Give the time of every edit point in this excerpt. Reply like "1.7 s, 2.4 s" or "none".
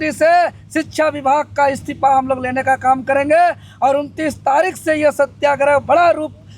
none